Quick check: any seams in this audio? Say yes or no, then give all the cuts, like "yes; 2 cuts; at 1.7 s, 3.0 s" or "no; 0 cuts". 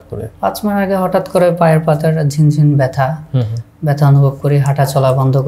no; 0 cuts